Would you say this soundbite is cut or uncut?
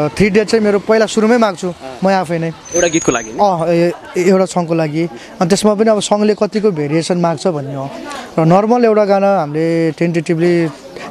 uncut